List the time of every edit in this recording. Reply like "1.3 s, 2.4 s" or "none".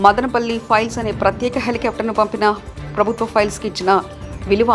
none